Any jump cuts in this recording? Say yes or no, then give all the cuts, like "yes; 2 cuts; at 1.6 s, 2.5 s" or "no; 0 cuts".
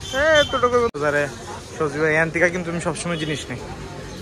yes; 1 cut; at 0.9 s